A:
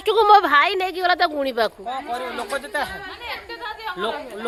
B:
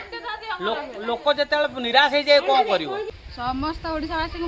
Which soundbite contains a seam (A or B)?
B